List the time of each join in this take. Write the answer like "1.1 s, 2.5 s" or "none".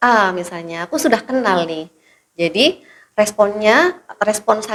none